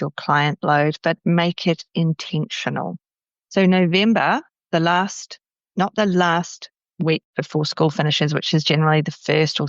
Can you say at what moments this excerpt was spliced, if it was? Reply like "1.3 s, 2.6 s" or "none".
3.3 s